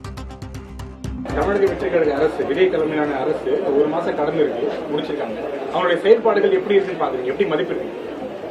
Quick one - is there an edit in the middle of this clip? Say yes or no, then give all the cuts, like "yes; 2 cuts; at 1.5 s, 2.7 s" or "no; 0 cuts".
yes; 1 cut; at 1.3 s